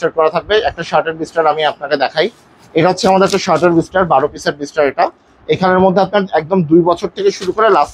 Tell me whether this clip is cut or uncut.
uncut